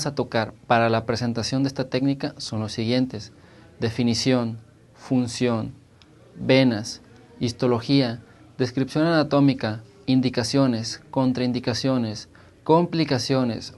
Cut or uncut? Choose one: uncut